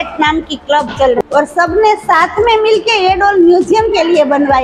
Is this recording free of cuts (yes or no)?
no